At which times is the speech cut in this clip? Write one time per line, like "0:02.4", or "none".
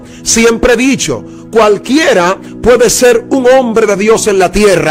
none